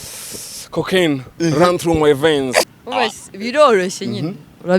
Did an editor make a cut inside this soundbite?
yes; 1 cut; at 2.7 s

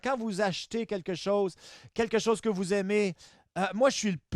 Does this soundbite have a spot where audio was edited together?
no; 0 cuts

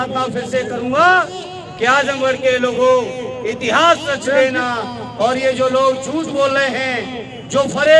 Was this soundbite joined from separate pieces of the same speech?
no; 0 cuts

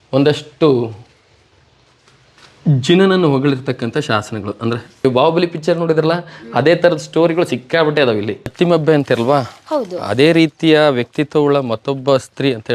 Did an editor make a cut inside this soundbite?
yes; 2 cuts; at 4.9 s, 8.5 s

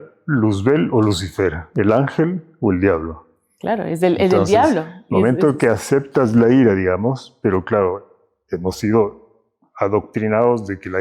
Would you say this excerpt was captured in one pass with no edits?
yes; 0 cuts

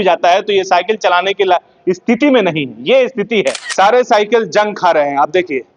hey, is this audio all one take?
no; 1 cut; at 3.6 s

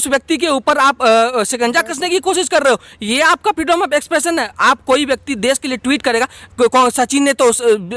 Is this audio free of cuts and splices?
yes; 0 cuts

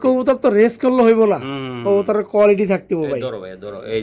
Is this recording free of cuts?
yes; 0 cuts

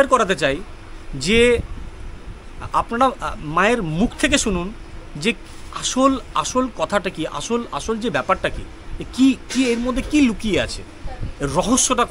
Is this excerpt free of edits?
yes; 0 cuts

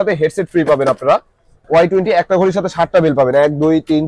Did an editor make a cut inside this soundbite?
yes; 1 cut; at 1.6 s

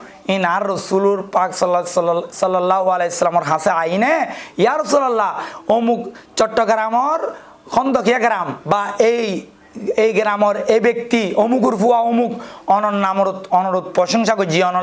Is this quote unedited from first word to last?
yes; 0 cuts

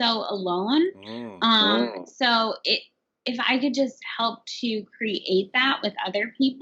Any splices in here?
no; 0 cuts

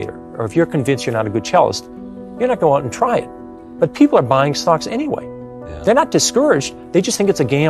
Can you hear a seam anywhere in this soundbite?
no; 0 cuts

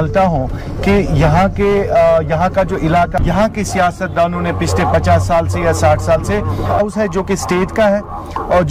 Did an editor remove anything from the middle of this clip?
yes; 2 cuts; at 3.2 s, 6.8 s

